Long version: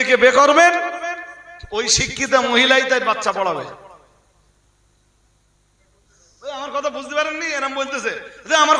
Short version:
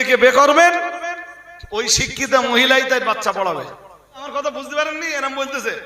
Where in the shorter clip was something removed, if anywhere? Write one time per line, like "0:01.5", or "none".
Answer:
0:04.2